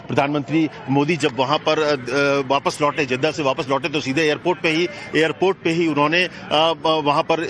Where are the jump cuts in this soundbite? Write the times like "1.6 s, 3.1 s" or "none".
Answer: 6.6 s